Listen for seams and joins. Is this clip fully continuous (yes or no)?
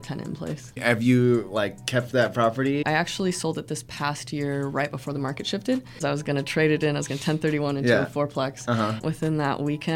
no